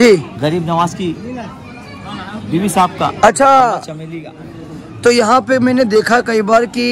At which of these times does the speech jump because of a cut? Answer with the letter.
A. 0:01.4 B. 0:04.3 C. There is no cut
C